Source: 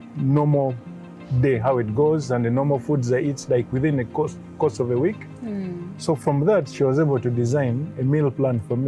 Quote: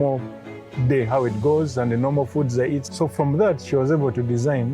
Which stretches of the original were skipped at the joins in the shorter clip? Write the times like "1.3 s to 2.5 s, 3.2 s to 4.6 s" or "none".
3.4 s to 5.9 s